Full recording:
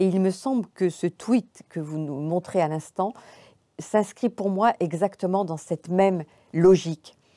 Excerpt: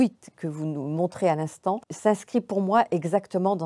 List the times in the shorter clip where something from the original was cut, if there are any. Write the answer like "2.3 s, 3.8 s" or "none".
1.9 s